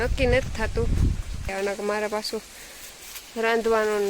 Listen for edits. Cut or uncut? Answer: cut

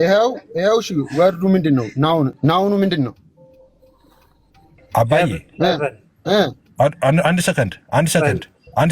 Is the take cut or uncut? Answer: cut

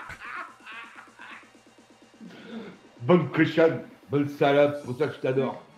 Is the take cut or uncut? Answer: uncut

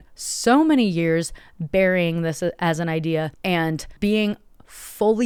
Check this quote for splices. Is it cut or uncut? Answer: uncut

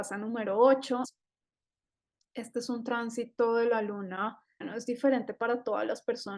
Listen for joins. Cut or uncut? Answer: cut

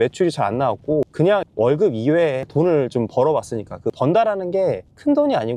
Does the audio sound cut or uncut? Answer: uncut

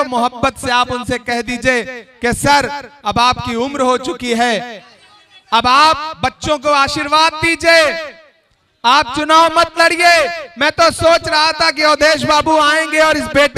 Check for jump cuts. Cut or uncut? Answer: uncut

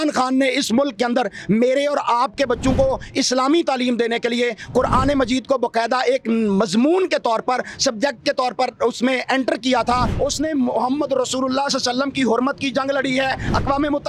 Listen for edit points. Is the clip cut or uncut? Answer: cut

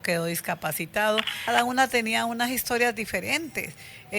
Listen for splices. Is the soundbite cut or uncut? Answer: cut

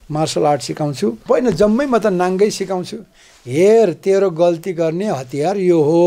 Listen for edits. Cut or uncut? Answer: cut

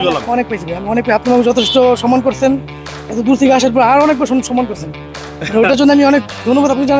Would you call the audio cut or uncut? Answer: uncut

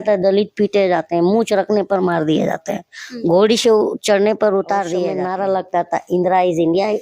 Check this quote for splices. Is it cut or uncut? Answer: cut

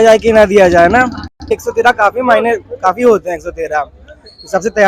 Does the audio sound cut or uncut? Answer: cut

